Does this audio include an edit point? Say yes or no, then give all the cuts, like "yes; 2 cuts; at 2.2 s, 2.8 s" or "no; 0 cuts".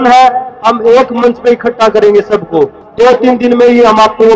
yes; 1 cut; at 2.8 s